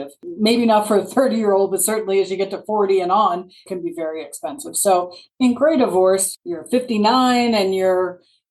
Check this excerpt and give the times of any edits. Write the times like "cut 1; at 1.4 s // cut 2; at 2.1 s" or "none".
cut 1; at 3.6 s // cut 2; at 6.3 s